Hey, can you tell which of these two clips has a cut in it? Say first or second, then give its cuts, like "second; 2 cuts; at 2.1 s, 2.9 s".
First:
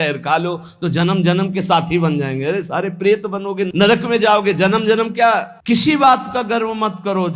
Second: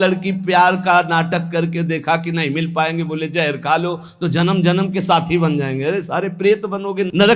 first; 1 cut; at 5.5 s